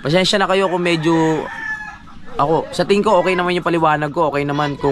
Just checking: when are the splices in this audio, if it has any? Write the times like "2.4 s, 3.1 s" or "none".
none